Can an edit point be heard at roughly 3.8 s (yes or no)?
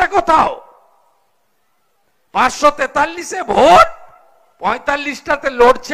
no